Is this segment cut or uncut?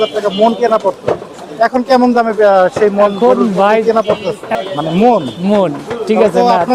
cut